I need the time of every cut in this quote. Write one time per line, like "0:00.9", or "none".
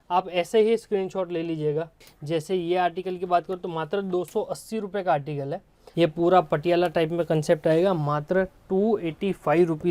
0:02.0
0:05.8